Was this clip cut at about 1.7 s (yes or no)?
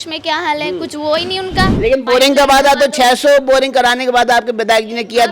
yes